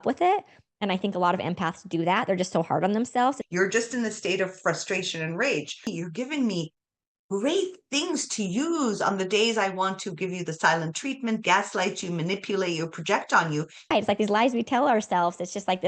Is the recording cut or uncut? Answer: cut